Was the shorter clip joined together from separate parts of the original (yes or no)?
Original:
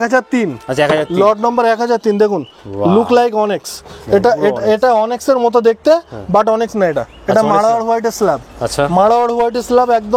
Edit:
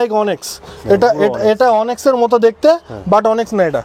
no